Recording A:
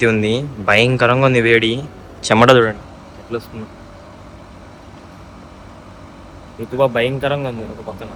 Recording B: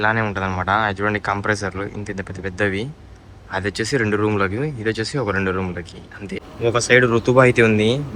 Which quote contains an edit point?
B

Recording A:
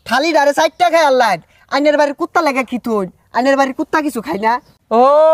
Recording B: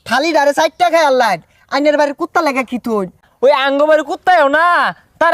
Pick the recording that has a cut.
B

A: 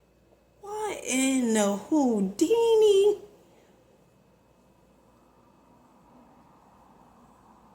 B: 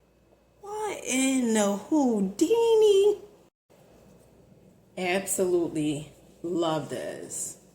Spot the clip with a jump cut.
B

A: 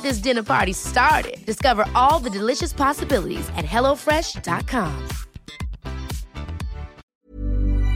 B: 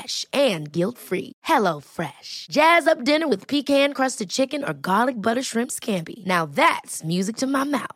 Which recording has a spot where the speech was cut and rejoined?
A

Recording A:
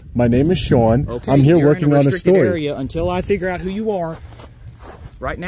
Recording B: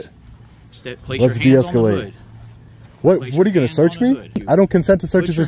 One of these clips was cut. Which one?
B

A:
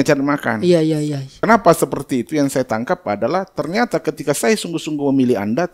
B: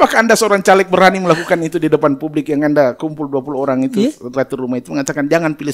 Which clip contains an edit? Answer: A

